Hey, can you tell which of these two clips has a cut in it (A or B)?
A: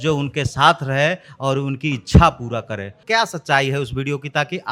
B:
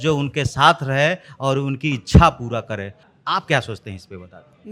A